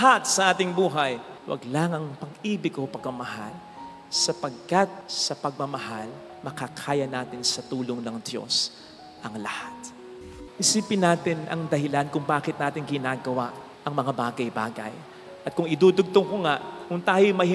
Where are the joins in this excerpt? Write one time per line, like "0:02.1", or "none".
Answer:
0:10.3